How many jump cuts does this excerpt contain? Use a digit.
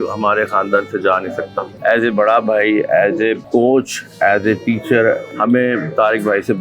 3